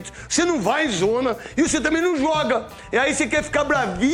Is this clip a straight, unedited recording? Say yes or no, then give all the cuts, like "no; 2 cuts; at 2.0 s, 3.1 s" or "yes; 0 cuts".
yes; 0 cuts